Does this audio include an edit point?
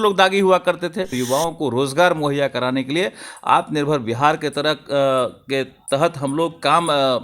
yes; 1 cut; at 1.2 s

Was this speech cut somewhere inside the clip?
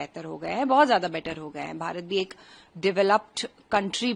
no; 0 cuts

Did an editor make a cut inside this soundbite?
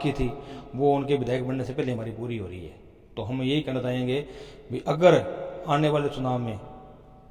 no; 0 cuts

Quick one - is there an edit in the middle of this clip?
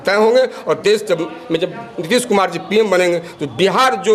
no; 0 cuts

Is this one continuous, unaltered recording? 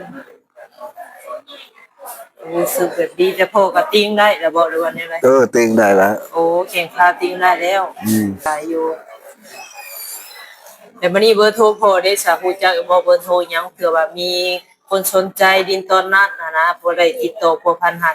no; 1 cut; at 8.5 s

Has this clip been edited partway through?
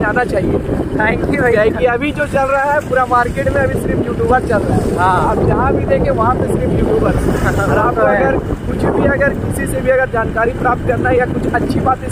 no; 0 cuts

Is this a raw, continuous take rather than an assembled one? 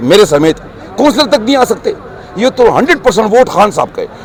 yes; 0 cuts

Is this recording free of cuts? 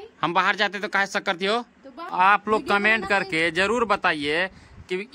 no; 1 cut; at 2.1 s

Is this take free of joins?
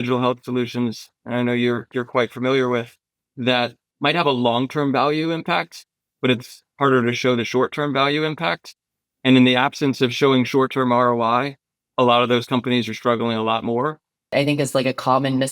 no; 2 cuts; at 3.8 s, 14.3 s

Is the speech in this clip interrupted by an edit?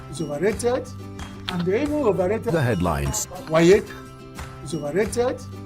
yes; 1 cut; at 2.5 s

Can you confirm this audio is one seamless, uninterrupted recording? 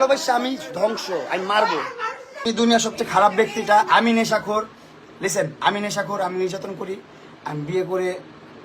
no; 1 cut; at 2.4 s

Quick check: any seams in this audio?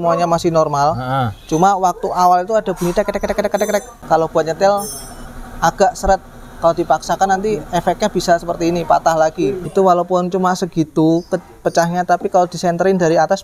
yes; 2 cuts; at 3.9 s, 9.6 s

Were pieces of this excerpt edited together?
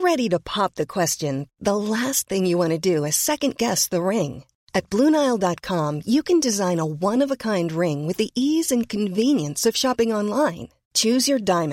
no; 0 cuts

